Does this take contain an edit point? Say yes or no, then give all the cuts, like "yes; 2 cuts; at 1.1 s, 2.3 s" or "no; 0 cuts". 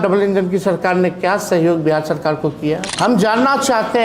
yes; 1 cut; at 2.9 s